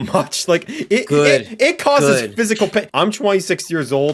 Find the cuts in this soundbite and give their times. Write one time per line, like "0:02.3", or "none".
0:02.9